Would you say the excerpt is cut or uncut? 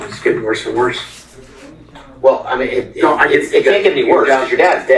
uncut